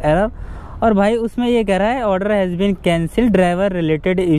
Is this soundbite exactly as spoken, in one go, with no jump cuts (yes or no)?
yes